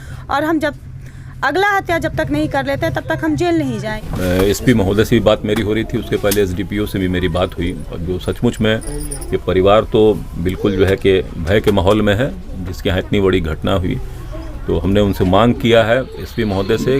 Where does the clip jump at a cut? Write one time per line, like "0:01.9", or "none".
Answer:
0:04.0